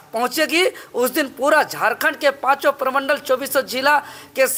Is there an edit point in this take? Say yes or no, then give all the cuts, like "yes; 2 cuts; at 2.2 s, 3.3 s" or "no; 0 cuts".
no; 0 cuts